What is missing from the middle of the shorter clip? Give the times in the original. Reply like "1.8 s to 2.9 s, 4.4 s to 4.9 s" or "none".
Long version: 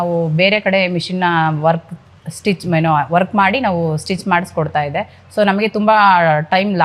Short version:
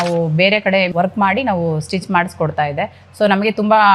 0.9 s to 3.1 s